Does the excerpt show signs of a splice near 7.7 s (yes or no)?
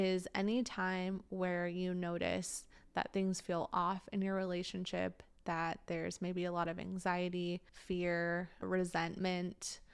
yes